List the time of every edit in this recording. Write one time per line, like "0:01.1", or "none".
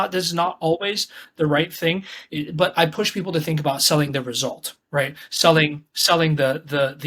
none